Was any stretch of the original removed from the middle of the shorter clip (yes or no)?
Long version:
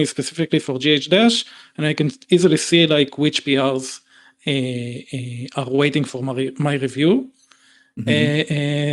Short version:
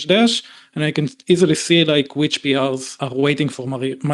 yes